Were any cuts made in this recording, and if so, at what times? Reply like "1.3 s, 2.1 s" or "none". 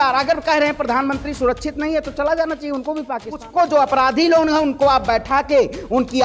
3.4 s